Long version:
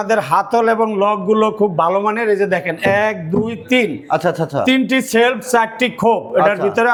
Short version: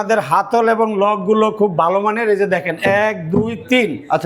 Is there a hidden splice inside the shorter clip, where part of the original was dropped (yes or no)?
no